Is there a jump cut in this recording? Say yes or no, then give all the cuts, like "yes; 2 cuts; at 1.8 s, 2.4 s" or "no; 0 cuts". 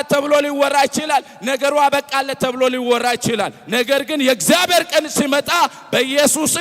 no; 0 cuts